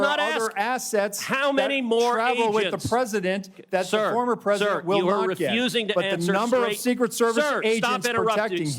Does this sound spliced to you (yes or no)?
no